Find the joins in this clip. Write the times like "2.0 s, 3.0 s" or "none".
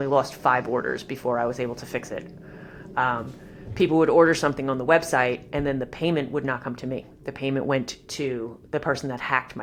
none